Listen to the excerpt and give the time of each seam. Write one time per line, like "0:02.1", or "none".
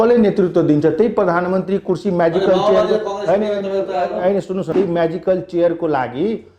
0:04.7